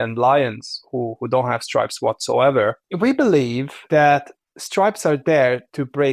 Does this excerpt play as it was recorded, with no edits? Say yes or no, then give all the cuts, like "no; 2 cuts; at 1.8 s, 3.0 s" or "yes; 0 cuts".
no; 2 cuts; at 2.8 s, 3.7 s